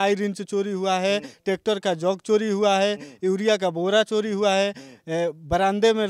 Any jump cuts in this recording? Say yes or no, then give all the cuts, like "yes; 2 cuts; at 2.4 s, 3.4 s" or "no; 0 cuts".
no; 0 cuts